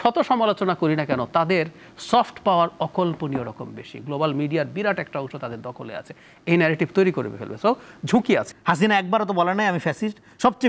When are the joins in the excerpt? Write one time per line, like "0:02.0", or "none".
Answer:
0:08.5